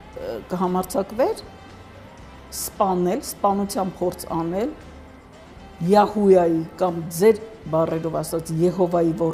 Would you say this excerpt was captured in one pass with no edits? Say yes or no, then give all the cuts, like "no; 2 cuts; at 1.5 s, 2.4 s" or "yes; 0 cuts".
yes; 0 cuts